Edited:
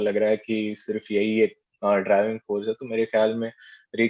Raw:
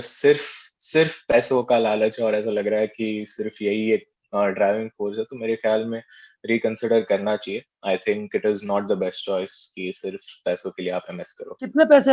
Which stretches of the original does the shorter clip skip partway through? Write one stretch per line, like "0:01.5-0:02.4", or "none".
none